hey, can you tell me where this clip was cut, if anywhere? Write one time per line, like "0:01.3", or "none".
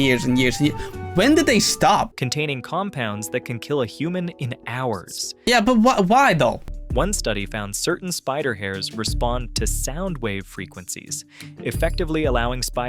0:02.1
0:06.6